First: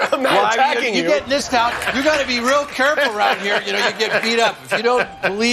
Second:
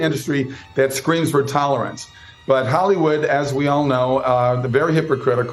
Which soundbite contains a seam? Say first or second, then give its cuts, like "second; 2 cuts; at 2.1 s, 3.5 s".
first; 1 cut; at 1.7 s